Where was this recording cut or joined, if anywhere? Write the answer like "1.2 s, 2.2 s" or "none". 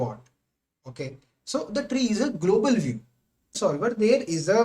3.6 s